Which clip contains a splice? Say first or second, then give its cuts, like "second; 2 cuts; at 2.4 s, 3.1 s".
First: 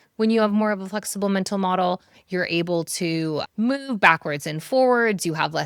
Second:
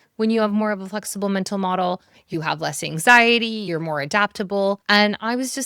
second; 3 cuts; at 2.3 s, 3.7 s, 4.8 s